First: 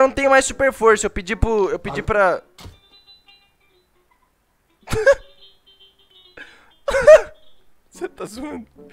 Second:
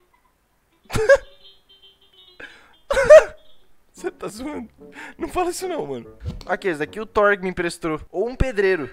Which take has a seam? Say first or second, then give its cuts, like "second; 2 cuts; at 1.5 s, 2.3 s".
second; 1 cut; at 6.1 s